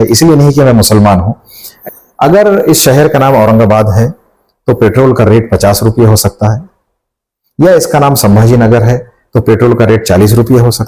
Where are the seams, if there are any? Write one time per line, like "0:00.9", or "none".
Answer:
0:01.7